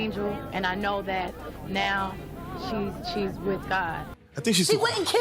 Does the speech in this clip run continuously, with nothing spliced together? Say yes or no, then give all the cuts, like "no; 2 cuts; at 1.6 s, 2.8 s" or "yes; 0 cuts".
no; 1 cut; at 4.0 s